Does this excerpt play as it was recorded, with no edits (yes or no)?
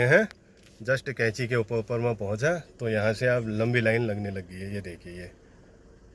yes